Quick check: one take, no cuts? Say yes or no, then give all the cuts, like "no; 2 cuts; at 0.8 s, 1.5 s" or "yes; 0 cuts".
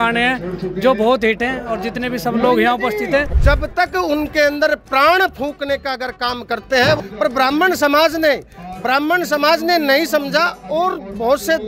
no; 2 cuts; at 3.3 s, 7.0 s